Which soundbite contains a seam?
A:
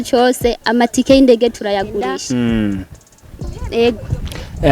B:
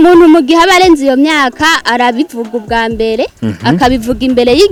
A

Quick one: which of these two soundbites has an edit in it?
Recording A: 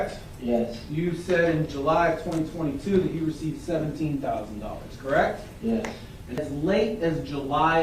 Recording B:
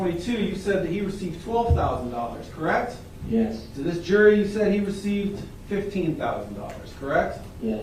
A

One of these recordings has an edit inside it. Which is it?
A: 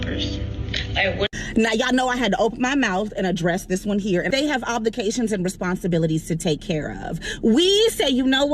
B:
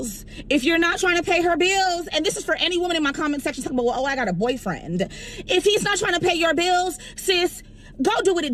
A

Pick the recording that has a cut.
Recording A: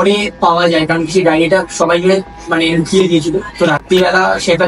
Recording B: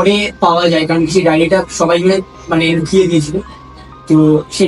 A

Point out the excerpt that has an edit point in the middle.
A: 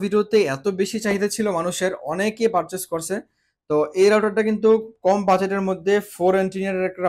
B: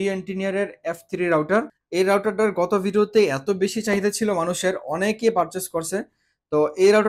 B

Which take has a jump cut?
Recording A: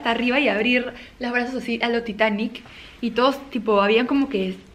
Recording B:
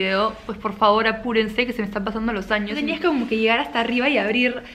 B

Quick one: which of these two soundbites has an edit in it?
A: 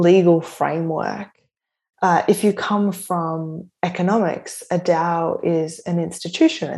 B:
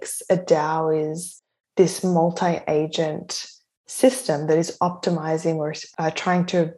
B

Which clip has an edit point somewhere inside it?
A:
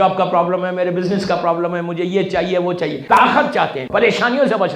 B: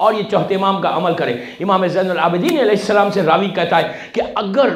A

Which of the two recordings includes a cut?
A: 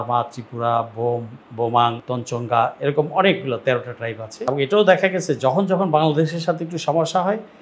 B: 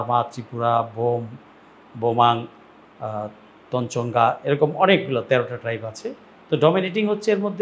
A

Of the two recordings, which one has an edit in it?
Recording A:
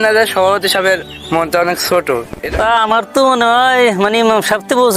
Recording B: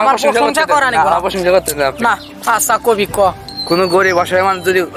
A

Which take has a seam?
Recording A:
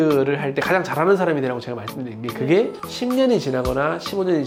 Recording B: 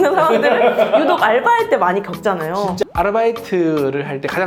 B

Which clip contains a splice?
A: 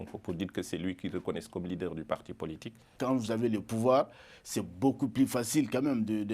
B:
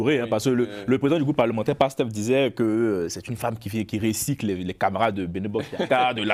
A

